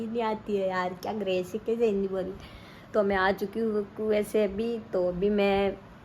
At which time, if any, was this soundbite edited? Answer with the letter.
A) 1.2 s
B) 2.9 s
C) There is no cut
C